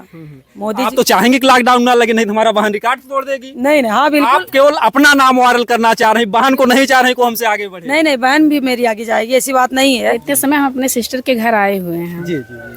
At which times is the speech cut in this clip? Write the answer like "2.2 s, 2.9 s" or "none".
10.2 s

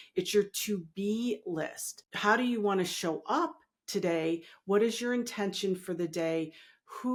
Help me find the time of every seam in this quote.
none

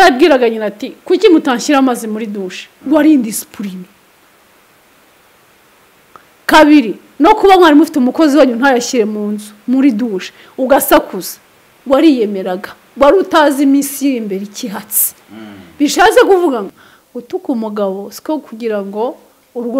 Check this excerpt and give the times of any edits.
16.7 s

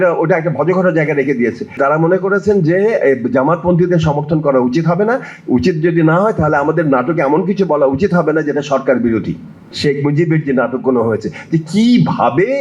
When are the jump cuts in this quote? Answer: 1.8 s, 9.6 s

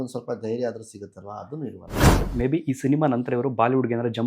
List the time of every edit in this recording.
2.3 s

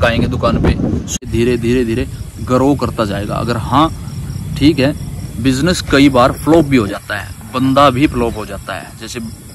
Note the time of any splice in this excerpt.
1.3 s

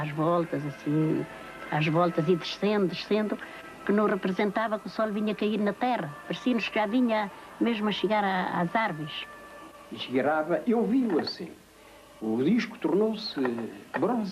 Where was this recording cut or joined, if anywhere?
none

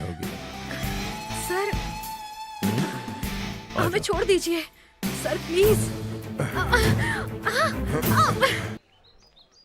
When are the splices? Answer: 8.8 s

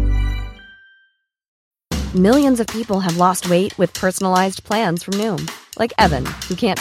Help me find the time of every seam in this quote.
1.5 s

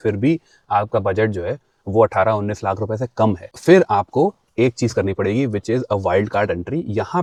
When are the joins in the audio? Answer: none

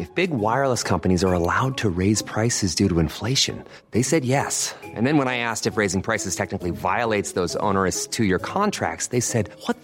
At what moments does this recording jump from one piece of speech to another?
none

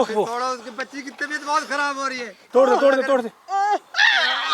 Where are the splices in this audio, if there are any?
2.4 s

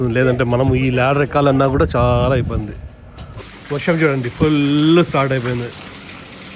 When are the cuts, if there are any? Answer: 3.5 s

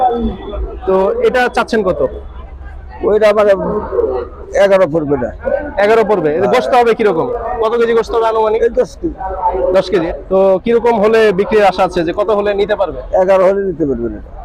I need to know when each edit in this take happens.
10.1 s

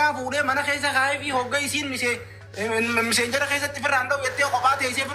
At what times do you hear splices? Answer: none

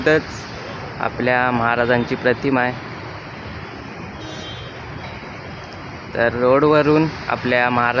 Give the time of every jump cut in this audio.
none

